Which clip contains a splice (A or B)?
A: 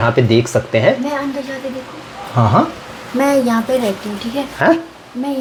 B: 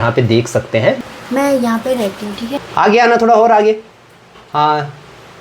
B